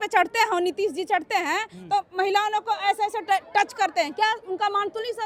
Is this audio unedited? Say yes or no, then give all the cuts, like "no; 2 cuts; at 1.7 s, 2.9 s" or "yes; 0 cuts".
yes; 0 cuts